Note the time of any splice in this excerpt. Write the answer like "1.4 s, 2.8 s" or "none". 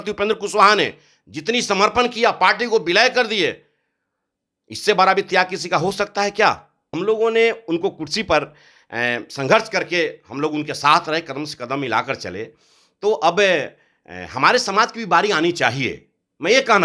6.9 s